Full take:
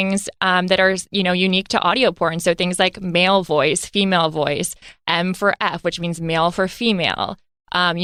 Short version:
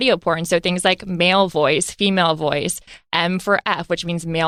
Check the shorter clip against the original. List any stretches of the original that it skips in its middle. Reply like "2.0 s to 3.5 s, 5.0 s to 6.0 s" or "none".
none